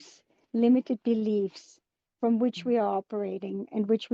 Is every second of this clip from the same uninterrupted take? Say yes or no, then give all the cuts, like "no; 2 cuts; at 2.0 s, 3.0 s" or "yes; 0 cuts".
yes; 0 cuts